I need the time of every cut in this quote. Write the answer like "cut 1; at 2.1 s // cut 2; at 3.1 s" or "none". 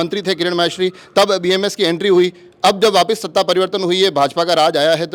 none